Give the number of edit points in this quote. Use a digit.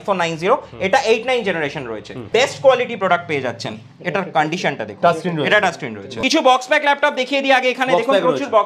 2